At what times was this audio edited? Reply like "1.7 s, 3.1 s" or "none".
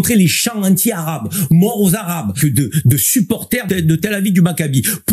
2.4 s, 3.6 s